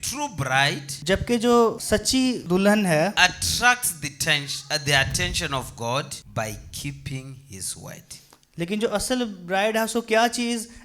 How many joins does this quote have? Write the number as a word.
three